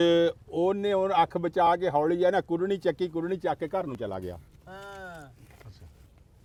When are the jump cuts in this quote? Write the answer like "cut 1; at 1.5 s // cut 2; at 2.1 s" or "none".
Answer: none